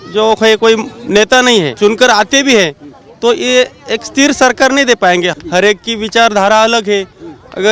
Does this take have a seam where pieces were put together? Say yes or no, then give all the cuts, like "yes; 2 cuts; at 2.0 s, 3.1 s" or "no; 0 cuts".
yes; 2 cuts; at 1.7 s, 5.3 s